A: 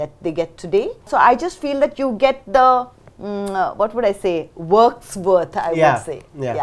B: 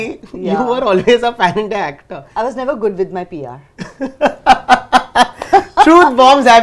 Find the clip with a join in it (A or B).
A